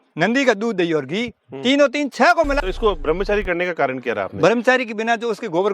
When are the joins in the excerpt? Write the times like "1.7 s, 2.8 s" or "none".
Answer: 2.6 s

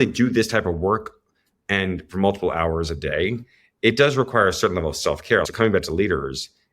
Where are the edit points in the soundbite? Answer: 5.5 s

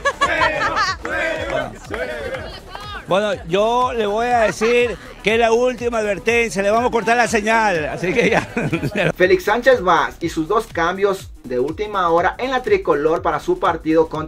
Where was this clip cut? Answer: 9.1 s

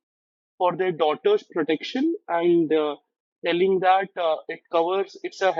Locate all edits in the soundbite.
none

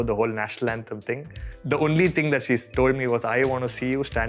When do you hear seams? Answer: none

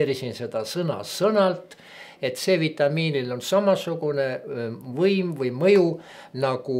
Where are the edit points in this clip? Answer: none

